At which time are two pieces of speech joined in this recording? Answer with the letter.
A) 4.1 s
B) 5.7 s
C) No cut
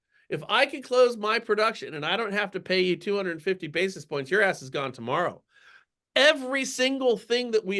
C